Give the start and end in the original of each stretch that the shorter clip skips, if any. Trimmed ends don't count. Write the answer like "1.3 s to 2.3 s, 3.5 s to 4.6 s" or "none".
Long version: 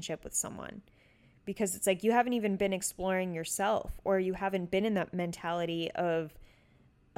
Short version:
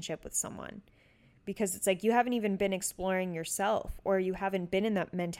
none